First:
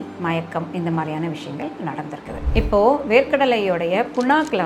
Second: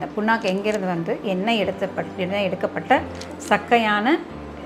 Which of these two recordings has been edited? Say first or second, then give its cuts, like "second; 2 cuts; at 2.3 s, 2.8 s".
first; 1 cut; at 2.4 s